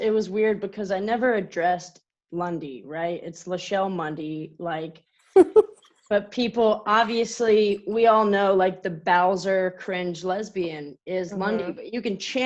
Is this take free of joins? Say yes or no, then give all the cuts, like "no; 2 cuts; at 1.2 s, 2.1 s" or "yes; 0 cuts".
yes; 0 cuts